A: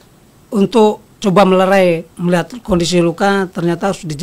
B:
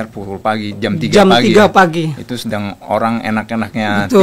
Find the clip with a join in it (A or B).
A